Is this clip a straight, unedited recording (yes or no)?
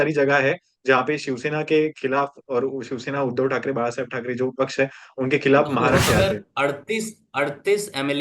no